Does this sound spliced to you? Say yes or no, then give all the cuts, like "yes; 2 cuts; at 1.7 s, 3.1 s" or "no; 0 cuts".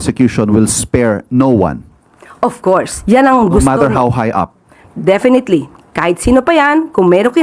no; 0 cuts